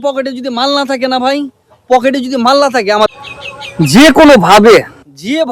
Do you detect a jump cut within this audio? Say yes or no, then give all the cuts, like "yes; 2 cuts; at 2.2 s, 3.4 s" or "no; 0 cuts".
yes; 1 cut; at 3.1 s